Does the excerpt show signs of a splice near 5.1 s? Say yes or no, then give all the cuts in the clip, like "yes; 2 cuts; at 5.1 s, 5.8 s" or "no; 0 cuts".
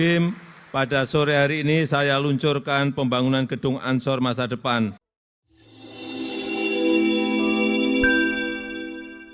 yes; 1 cut; at 5.1 s